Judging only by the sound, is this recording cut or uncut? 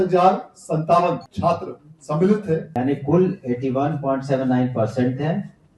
cut